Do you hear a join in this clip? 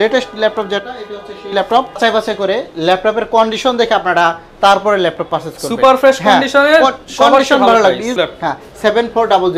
yes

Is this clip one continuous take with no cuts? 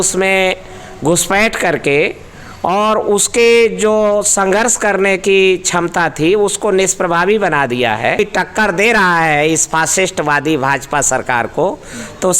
no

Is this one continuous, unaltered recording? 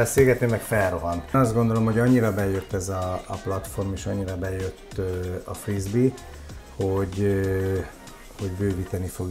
no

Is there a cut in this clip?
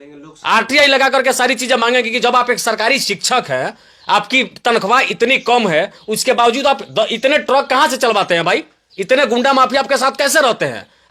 no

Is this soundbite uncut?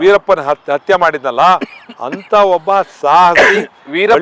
yes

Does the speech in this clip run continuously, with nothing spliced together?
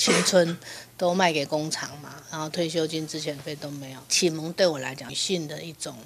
no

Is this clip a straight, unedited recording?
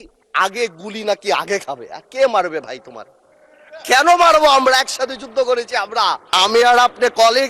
no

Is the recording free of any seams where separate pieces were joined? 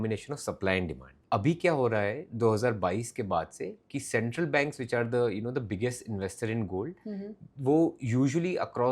no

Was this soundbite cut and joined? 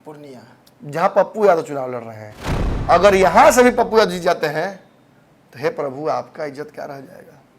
yes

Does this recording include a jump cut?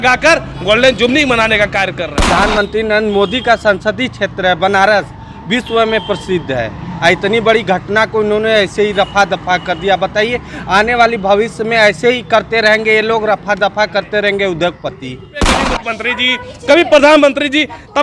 yes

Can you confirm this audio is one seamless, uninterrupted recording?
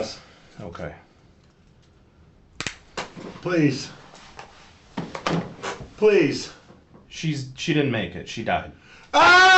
yes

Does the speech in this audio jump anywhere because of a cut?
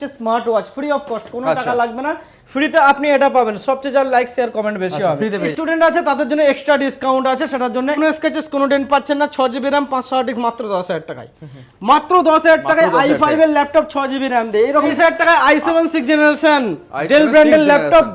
yes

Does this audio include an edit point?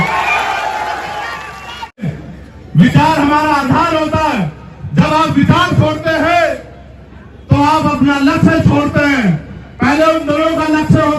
yes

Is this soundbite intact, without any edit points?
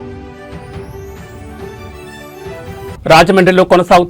no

